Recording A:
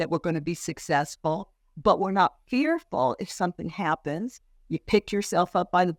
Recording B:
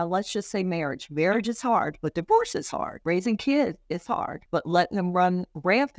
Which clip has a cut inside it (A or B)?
B